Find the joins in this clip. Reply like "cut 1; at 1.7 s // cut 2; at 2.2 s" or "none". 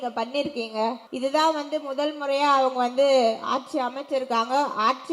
cut 1; at 1.1 s

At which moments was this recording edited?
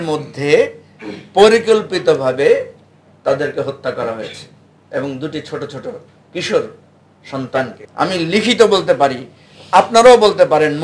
cut 1; at 7.8 s

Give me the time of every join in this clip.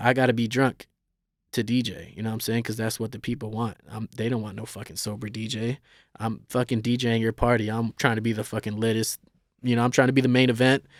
none

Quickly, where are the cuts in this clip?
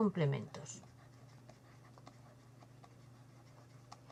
none

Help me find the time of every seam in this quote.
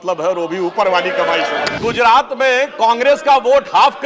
cut 1; at 1.7 s

